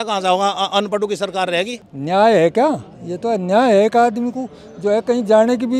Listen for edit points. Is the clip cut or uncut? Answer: cut